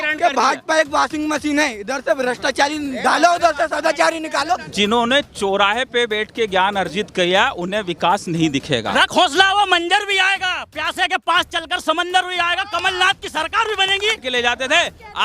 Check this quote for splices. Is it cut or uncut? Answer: cut